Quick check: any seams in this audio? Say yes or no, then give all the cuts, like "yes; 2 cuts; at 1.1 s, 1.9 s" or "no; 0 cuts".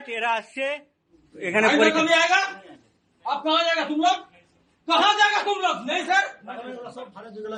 no; 0 cuts